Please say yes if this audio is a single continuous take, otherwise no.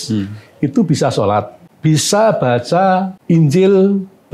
no